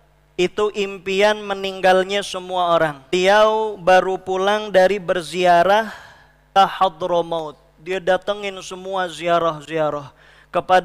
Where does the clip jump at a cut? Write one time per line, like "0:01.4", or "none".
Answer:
0:03.1
0:06.5